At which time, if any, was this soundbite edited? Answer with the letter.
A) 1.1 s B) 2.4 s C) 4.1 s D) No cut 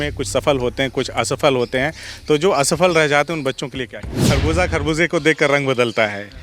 C